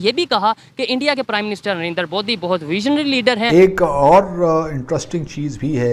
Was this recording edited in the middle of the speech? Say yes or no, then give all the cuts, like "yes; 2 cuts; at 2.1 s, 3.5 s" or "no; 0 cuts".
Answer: yes; 1 cut; at 3.5 s